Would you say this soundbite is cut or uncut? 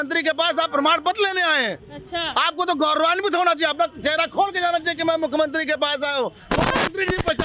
uncut